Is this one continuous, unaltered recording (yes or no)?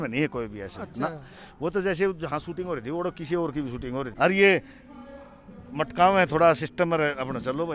no